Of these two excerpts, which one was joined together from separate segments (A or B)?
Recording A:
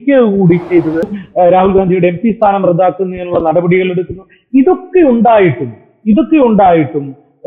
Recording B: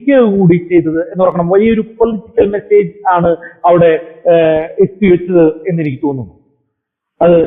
A